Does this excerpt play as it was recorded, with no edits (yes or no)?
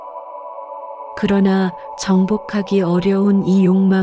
yes